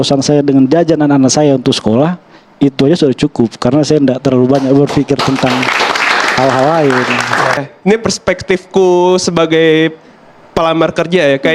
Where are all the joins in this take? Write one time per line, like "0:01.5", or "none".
0:07.6